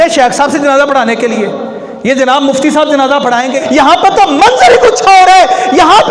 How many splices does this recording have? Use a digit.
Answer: 1